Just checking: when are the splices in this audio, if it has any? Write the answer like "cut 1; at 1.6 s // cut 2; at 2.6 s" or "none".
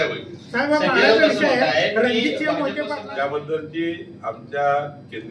cut 1; at 2.8 s